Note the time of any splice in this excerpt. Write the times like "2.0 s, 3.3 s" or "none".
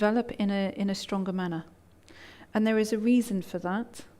1.2 s